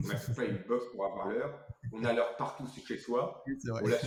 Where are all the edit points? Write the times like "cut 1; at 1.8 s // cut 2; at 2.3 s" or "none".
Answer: none